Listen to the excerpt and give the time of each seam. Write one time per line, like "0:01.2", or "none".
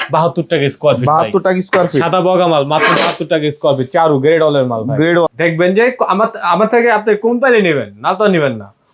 0:05.3